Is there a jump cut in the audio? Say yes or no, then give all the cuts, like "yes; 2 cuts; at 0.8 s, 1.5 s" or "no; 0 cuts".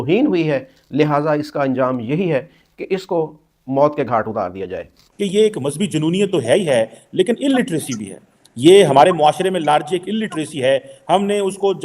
yes; 1 cut; at 5.0 s